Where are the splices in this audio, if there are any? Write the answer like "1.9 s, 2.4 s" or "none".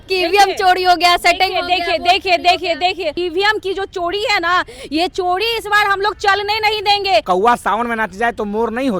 3.2 s, 7.2 s

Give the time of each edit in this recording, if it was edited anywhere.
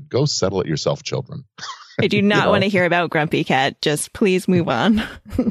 none

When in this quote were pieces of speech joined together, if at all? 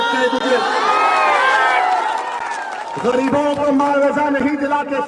none

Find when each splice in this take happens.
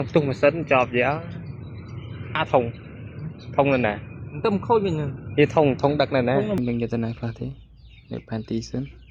6.6 s

